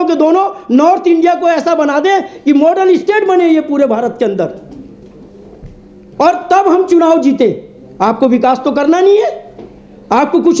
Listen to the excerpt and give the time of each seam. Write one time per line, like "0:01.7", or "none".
none

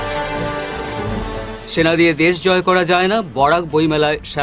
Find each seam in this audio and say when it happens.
0:01.1

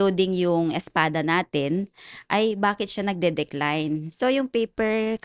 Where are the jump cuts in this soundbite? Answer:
0:04.1

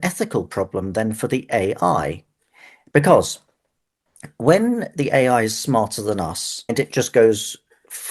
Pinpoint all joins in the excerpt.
0:06.7

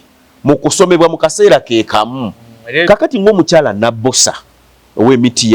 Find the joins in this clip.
0:02.8

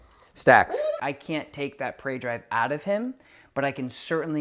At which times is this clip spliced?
0:01.0

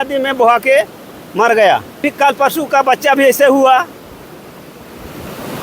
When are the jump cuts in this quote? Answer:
0:02.1

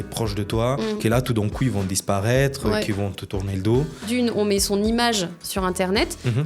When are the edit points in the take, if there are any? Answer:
0:01.0
0:04.1

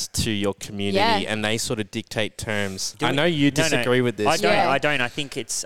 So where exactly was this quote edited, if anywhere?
0:02.8

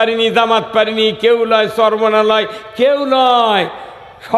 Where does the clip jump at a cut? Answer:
none

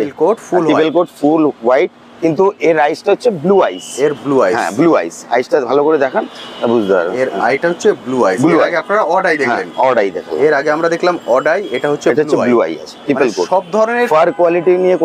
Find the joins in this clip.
none

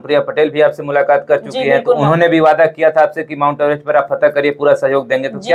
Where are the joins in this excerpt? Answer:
none

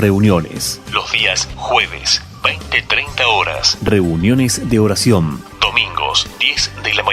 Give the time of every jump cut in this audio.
0:01.4
0:05.5

